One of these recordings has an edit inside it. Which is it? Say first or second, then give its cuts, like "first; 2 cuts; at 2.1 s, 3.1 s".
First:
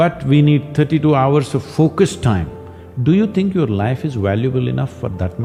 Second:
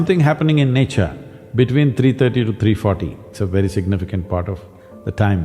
second; 1 cut; at 3.3 s